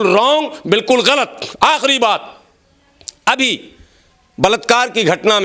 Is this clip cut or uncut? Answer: uncut